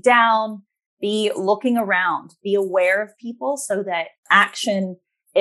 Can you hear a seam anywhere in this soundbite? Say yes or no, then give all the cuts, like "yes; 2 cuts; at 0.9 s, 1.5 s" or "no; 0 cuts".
no; 0 cuts